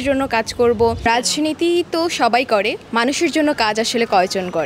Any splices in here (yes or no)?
yes